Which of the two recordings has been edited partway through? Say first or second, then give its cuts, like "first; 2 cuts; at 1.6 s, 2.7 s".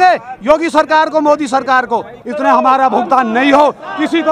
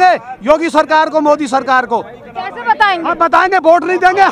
first; 1 cut; at 2.2 s